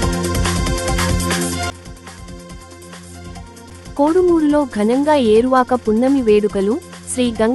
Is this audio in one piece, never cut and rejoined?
no; 1 cut; at 1.7 s

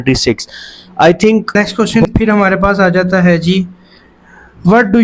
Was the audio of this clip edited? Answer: yes; 1 cut; at 1.6 s

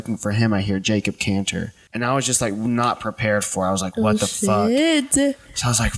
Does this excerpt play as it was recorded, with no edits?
no; 1 cut; at 1.8 s

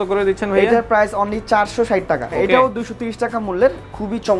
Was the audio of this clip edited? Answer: yes; 1 cut; at 2.3 s

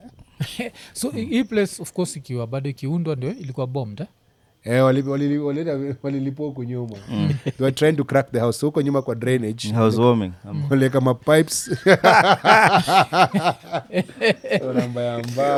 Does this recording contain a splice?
no; 0 cuts

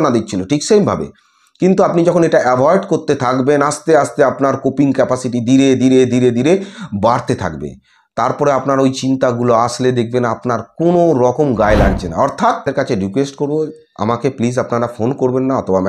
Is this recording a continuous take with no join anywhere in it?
no; 1 cut; at 12.7 s

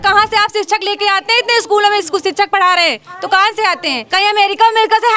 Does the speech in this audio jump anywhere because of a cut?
yes; 1 cut; at 4.0 s

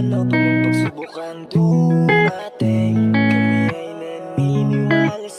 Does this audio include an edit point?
no; 0 cuts

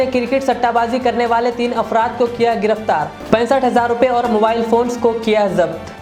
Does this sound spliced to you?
no; 0 cuts

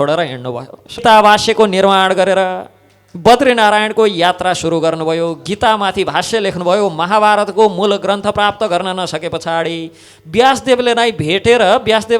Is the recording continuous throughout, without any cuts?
no; 1 cut; at 1.0 s

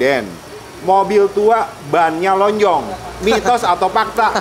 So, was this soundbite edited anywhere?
no; 0 cuts

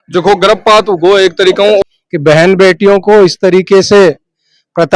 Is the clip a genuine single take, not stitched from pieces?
no; 1 cut; at 1.8 s

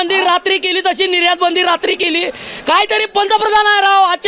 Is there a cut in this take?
no; 0 cuts

